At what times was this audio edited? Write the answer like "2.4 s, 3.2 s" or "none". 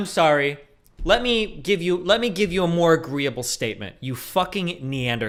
none